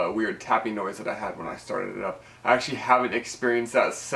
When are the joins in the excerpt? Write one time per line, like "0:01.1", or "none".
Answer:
none